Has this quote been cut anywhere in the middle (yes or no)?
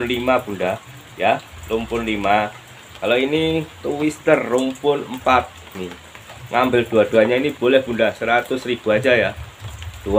no